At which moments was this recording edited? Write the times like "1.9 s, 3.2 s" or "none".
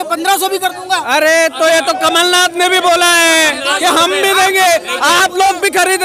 none